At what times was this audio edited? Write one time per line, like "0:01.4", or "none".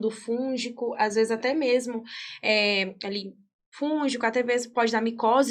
none